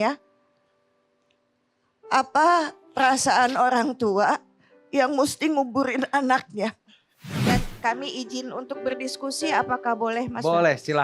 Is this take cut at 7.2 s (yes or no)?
yes